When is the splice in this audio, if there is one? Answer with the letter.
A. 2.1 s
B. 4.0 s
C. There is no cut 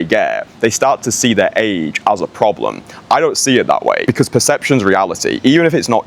B